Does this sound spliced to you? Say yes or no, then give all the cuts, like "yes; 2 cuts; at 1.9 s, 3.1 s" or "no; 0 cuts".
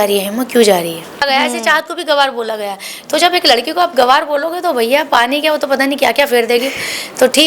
yes; 1 cut; at 1.2 s